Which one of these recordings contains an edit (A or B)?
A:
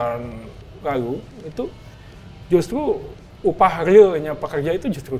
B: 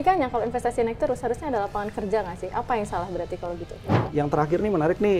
B